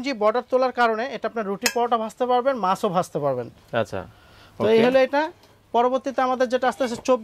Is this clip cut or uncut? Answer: uncut